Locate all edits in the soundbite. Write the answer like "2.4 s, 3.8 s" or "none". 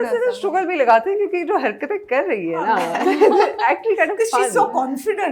none